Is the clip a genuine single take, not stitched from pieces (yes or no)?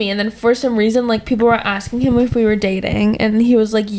yes